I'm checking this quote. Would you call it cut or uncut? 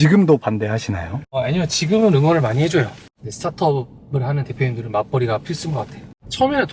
cut